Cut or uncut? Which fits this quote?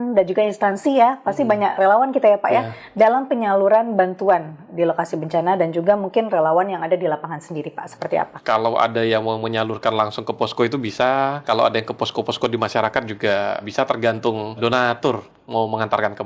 cut